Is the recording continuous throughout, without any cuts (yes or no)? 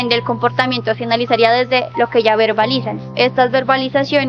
yes